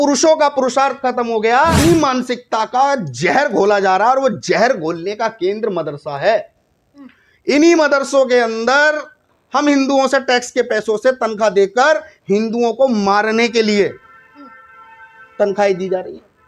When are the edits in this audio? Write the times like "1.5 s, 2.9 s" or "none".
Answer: 1.8 s

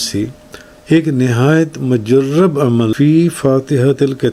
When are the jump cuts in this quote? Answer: 2.9 s

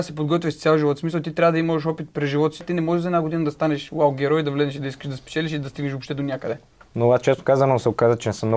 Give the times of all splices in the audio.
2.6 s, 6.7 s

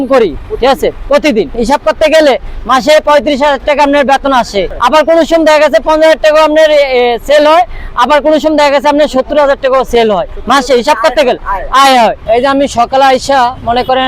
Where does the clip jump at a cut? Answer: none

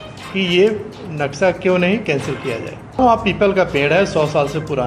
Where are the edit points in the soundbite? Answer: 3.0 s

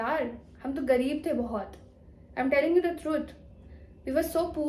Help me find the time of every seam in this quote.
none

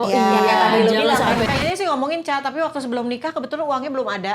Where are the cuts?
1.5 s

